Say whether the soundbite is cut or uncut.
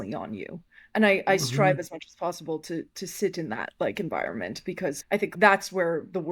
cut